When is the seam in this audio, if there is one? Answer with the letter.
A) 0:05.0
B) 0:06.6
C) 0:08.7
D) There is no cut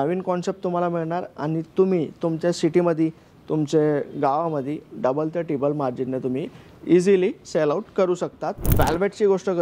C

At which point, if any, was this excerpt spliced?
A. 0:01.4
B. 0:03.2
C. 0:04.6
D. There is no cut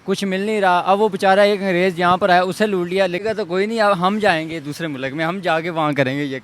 B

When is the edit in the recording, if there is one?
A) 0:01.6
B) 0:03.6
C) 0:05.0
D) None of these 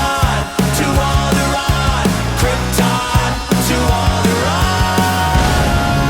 D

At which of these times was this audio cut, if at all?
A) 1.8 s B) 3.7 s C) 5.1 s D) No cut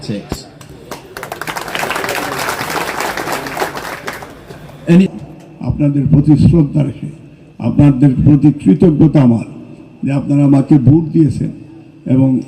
C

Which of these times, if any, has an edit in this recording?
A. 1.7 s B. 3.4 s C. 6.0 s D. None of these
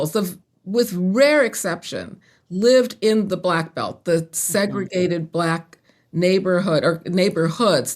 D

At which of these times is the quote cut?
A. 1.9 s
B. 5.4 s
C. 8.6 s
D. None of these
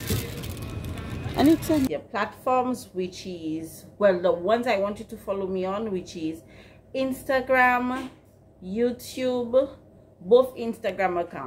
A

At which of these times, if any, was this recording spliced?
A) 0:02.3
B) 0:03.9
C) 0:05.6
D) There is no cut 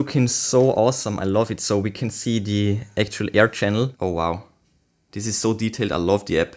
B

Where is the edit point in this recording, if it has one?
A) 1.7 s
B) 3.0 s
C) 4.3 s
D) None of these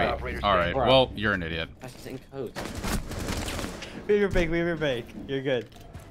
A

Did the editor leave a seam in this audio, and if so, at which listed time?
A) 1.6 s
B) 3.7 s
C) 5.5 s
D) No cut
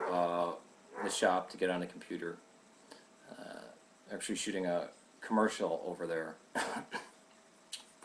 C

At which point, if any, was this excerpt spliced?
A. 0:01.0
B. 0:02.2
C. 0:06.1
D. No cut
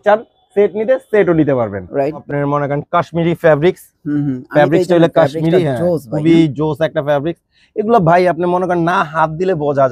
B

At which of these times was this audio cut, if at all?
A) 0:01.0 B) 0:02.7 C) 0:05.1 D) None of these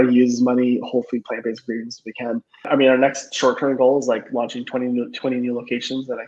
B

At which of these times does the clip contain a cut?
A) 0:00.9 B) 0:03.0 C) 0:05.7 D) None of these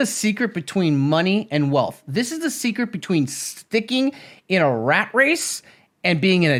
D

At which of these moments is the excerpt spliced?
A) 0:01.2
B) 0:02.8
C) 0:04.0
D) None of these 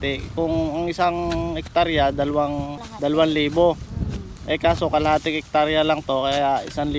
B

